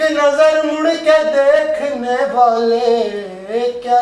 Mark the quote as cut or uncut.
uncut